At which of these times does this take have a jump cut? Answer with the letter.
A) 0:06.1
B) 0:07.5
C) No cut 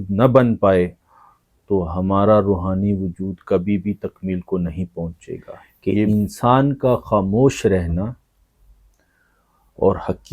A